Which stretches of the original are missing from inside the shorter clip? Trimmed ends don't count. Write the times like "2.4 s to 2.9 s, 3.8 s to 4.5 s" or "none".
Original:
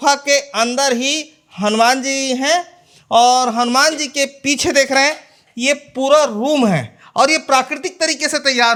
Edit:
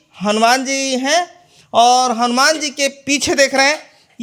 none